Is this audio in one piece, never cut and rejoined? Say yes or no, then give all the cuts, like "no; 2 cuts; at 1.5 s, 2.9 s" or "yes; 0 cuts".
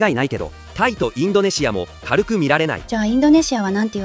yes; 0 cuts